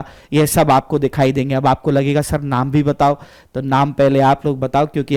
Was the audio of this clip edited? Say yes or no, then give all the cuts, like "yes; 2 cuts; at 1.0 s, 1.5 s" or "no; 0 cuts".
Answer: no; 0 cuts